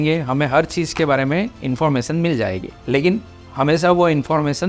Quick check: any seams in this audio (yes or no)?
no